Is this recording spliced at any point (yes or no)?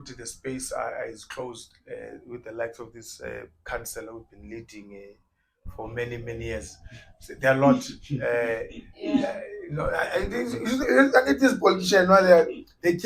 no